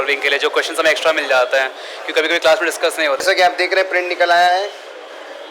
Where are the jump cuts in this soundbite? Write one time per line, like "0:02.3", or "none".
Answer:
0:03.2

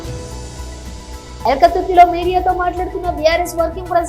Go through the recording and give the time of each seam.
0:01.4

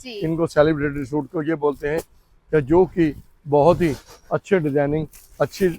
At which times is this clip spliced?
none

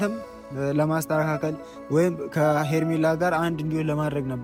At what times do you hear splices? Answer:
none

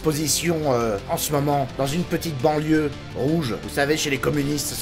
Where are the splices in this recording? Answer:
none

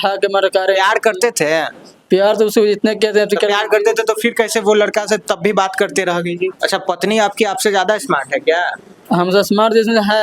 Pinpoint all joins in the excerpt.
0:06.6

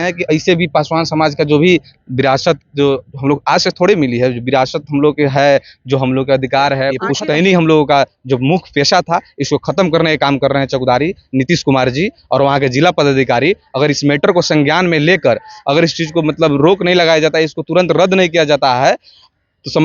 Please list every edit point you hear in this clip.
0:07.1

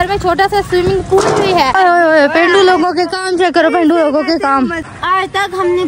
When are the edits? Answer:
0:01.7
0:04.9

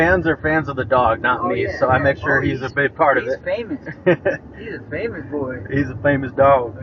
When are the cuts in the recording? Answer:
none

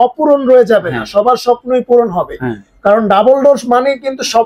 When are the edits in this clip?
none

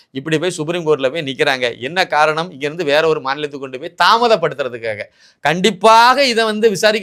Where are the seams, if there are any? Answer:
none

